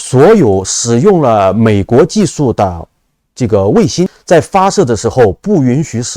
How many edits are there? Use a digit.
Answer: 1